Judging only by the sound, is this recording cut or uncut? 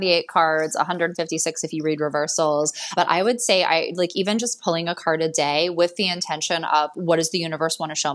uncut